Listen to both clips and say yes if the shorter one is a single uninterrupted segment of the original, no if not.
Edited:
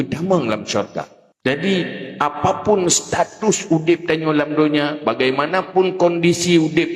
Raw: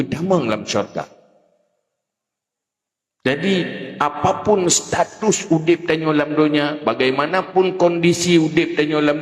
no